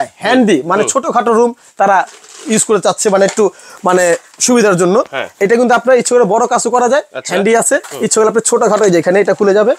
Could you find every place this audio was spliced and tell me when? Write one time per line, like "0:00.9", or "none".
none